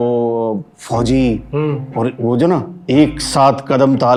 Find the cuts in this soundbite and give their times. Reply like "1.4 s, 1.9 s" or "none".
none